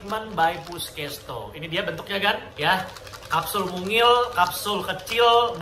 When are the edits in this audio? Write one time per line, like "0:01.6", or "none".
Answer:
0:02.5